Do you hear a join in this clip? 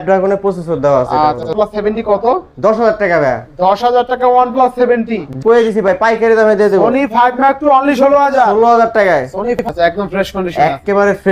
yes; 3 cuts; at 1.5 s, 5.3 s, 9.6 s

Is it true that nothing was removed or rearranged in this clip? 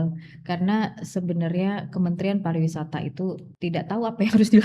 no; 1 cut; at 3.5 s

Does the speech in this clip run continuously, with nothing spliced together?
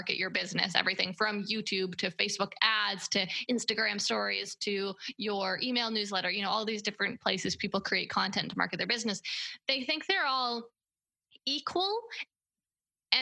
yes; 0 cuts

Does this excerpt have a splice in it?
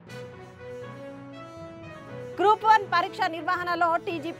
yes; 1 cut; at 1.7 s

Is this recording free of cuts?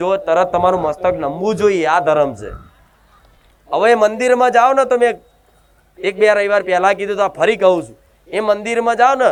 yes; 0 cuts

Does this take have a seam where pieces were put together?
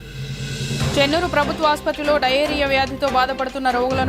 yes; 1 cut; at 0.9 s

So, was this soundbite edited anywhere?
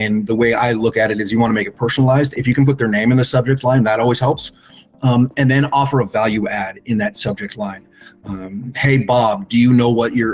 no; 0 cuts

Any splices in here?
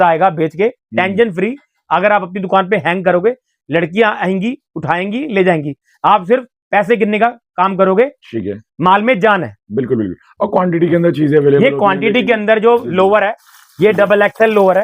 no; 0 cuts

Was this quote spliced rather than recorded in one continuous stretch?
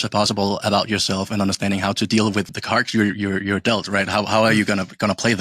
yes; 1 cut; at 2.5 s

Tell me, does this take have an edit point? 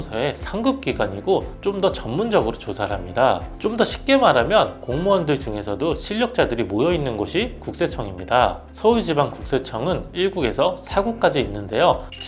no; 0 cuts

